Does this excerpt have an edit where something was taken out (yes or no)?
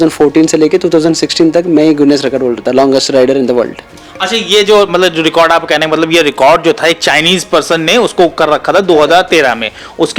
no